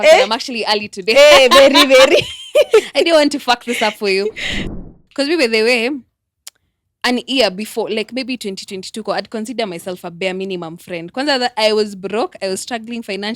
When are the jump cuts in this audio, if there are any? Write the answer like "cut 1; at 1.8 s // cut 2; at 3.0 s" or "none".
cut 1; at 4.7 s